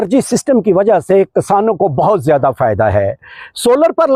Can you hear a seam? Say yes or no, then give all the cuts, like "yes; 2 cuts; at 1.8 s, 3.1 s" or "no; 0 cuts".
no; 0 cuts